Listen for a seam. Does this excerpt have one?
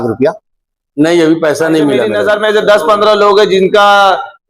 yes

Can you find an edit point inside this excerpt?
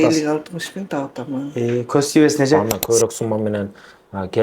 yes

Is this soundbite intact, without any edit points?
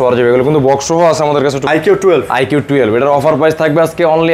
no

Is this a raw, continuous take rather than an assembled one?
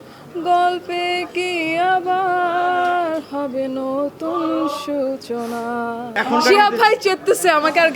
no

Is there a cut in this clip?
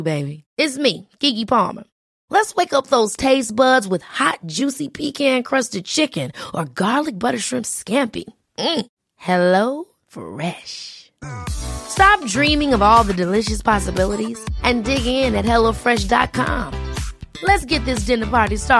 no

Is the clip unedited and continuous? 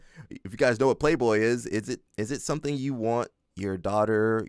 no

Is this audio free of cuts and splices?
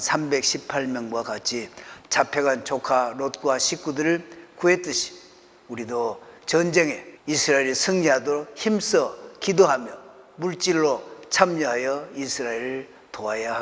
no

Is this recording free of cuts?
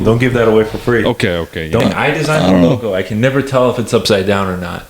no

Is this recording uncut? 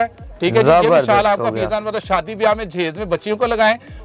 yes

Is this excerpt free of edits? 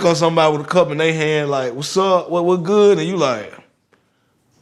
yes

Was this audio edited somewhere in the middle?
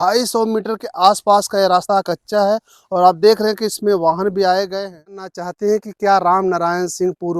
yes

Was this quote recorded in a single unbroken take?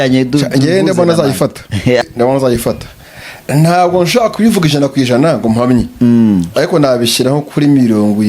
no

